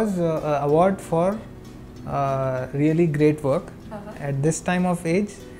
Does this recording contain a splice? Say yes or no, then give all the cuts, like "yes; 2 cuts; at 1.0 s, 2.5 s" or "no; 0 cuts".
no; 0 cuts